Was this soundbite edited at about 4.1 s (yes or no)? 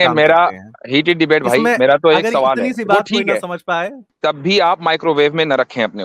yes